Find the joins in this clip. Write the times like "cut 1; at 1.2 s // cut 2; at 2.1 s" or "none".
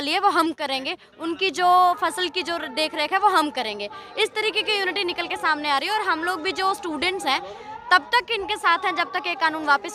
none